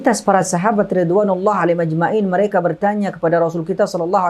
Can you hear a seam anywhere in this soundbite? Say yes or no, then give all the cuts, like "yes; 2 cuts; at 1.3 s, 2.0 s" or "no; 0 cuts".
no; 0 cuts